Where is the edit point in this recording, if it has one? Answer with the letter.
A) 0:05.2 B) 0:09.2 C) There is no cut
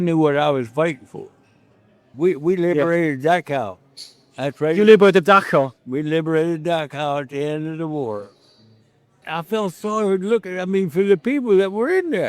B